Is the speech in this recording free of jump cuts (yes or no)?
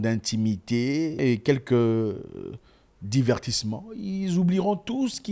no